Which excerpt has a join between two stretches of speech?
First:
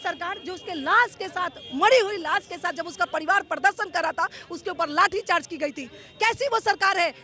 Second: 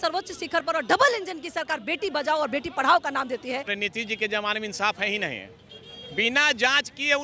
second; 1 cut; at 3.7 s

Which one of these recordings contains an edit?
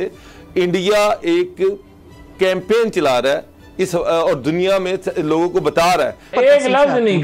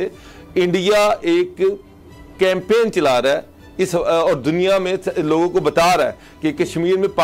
first; 1 cut; at 6.3 s

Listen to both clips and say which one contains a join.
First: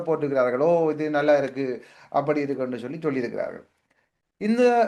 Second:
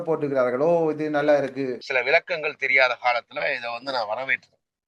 second; 1 cut; at 1.8 s

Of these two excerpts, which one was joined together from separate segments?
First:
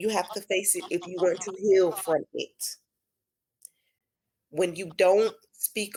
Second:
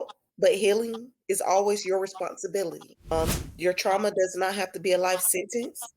second; 1 cut; at 2.9 s

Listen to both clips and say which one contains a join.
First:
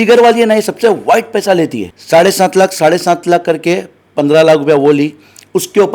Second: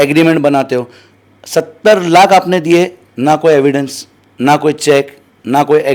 first; 1 cut; at 1.9 s

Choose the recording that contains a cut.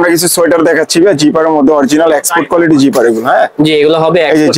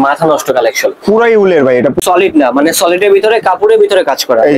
second; 1 cut; at 2.0 s

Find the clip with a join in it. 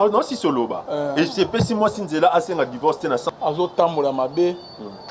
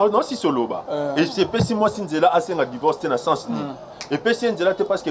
first; 1 cut; at 3.2 s

